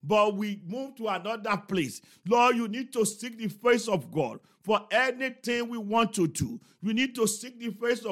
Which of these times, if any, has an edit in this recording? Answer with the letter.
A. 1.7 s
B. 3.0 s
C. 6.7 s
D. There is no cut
D